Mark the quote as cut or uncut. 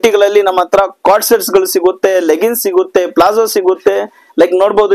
uncut